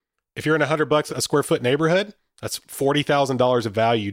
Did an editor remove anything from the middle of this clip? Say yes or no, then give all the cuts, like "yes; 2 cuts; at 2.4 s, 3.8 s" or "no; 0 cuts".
yes; 1 cut; at 1.1 s